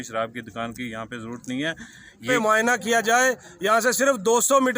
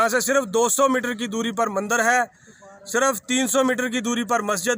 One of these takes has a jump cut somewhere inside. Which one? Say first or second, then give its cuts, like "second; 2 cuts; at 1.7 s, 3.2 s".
first; 1 cut; at 2.3 s